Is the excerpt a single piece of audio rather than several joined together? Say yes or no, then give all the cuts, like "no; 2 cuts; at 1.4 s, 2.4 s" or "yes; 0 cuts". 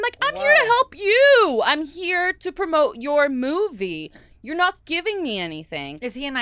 yes; 0 cuts